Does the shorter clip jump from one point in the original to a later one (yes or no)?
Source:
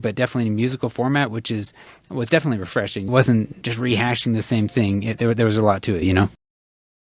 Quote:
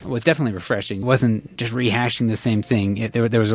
no